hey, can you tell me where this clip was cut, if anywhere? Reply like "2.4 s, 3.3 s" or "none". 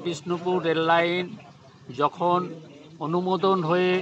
none